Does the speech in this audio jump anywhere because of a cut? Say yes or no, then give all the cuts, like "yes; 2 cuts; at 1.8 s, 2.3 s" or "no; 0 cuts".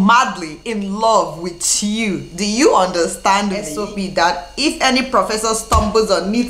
yes; 1 cut; at 3.7 s